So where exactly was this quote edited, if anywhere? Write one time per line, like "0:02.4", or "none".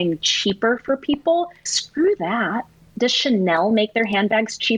0:01.7